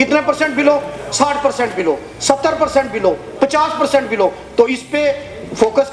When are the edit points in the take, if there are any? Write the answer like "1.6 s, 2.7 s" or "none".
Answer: none

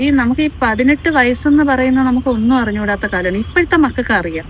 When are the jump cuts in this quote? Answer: none

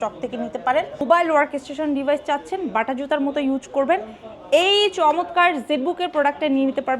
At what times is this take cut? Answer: 1.0 s

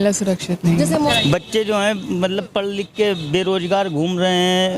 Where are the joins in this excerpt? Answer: 1.1 s

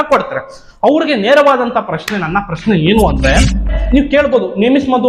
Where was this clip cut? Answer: 3.6 s

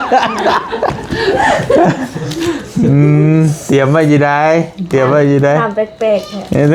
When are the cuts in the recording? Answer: none

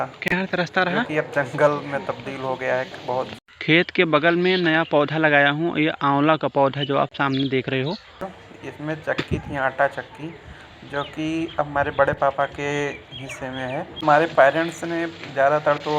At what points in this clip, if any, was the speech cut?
3.3 s, 8.4 s, 14.0 s

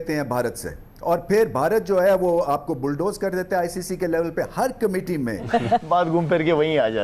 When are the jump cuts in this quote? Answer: 5.5 s

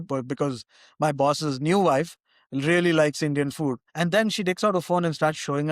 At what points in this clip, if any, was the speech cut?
3.9 s

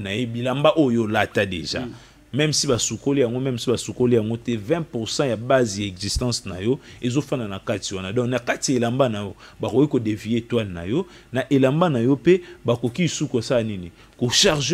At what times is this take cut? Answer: none

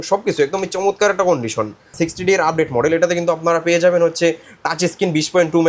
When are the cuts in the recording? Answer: 2.0 s

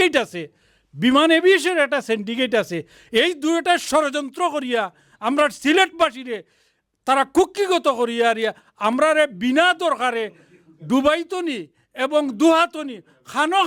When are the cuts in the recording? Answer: none

